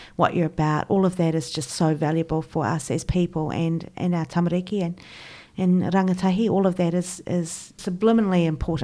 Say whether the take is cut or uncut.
cut